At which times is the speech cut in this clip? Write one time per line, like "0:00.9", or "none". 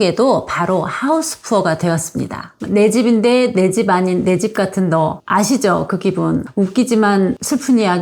0:02.6